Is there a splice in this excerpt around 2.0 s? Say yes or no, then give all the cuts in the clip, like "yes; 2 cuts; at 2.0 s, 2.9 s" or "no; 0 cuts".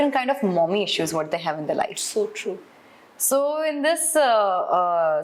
no; 0 cuts